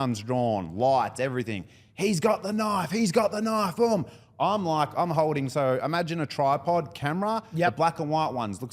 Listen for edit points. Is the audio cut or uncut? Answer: uncut